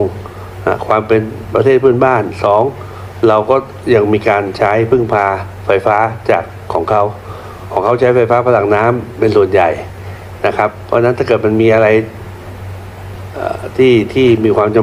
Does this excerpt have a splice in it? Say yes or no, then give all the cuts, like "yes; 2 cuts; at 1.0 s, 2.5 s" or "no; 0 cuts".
no; 0 cuts